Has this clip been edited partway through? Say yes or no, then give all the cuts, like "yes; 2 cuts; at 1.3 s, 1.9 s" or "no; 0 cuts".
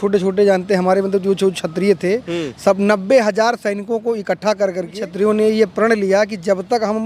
yes; 1 cut; at 5.0 s